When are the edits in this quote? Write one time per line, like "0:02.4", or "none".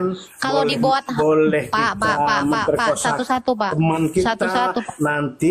none